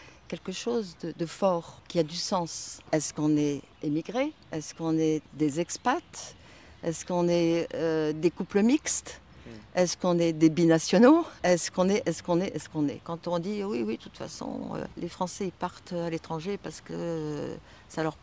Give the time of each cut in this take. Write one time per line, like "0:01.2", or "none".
0:01.8
0:02.7
0:03.7
0:04.4
0:05.3
0:11.3
0:13.1
0:14.9